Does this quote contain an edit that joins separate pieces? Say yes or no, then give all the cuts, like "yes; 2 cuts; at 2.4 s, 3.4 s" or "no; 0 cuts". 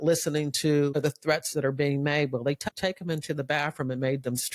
yes; 2 cuts; at 1.0 s, 2.6 s